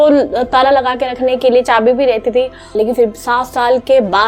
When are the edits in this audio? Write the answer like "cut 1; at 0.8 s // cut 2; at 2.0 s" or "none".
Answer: cut 1; at 2.6 s